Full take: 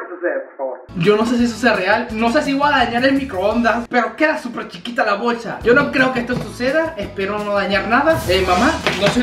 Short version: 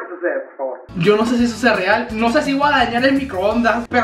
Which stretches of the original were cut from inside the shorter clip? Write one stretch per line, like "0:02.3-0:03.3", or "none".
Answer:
none